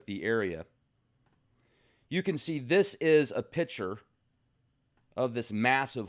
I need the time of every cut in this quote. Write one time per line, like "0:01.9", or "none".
none